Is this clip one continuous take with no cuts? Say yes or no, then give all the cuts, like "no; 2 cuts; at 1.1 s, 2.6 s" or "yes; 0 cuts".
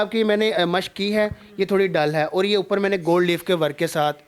yes; 0 cuts